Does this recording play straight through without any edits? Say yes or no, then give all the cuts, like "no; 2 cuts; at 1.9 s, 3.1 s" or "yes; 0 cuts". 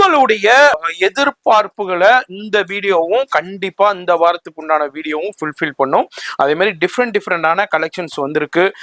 yes; 0 cuts